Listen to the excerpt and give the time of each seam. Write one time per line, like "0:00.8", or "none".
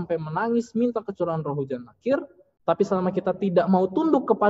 0:02.4